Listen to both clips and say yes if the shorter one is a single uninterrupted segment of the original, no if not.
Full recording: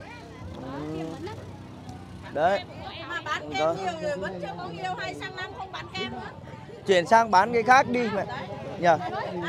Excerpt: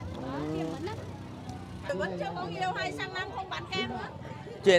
no